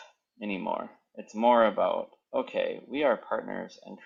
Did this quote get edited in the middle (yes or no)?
no